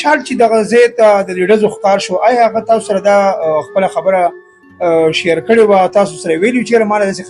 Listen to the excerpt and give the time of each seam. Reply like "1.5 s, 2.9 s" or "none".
none